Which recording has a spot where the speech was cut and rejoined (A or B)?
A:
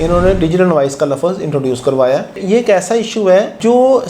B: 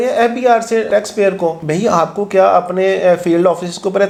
A